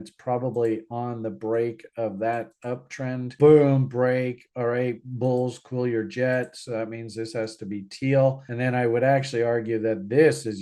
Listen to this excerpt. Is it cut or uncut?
cut